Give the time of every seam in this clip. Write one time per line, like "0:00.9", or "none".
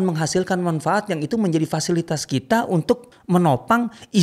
0:03.1